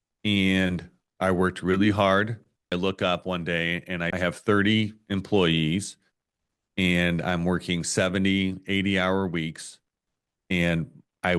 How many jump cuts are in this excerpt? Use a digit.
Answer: 2